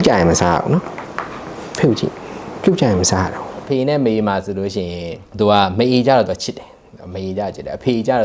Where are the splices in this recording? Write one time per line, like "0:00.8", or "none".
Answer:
0:03.6